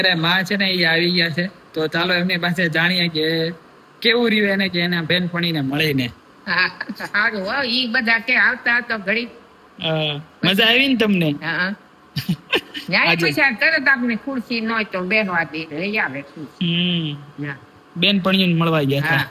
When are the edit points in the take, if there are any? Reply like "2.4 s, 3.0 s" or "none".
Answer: none

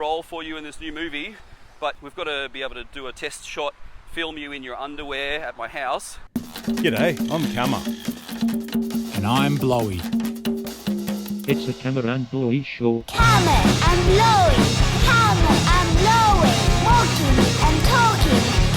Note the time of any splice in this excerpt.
2.0 s, 6.5 s

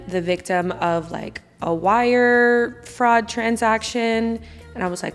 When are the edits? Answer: none

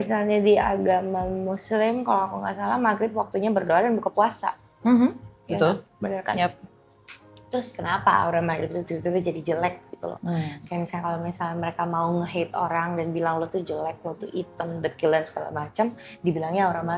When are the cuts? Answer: none

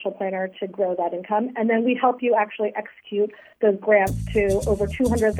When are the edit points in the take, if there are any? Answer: none

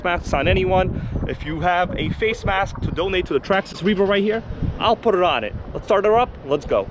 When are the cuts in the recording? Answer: none

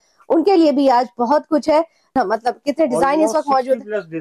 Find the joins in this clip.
2.1 s

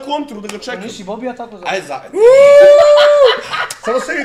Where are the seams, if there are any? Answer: none

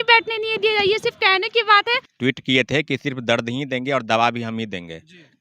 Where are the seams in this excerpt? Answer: 2.1 s

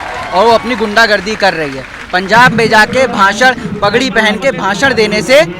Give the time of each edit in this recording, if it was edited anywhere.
none

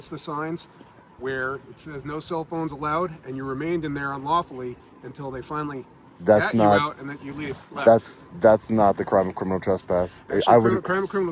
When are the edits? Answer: none

